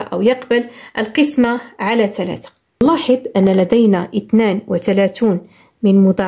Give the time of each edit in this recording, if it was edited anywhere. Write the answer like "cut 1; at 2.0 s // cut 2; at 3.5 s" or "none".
cut 1; at 2.8 s